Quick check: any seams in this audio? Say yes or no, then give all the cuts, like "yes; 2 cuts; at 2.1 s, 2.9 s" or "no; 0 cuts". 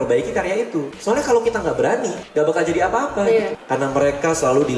yes; 3 cuts; at 0.9 s, 2.2 s, 3.6 s